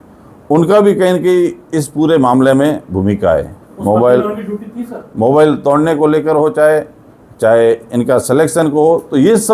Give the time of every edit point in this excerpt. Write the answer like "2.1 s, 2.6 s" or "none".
none